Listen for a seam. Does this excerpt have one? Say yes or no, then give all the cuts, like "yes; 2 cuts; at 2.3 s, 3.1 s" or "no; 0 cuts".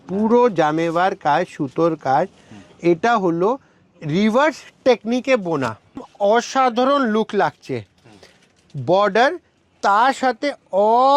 yes; 1 cut; at 6.1 s